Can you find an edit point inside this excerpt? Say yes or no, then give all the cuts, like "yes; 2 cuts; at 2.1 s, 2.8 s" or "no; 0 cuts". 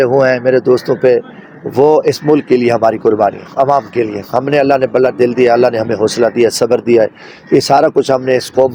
no; 0 cuts